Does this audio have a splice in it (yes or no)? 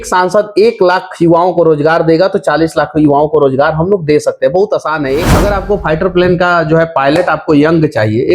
yes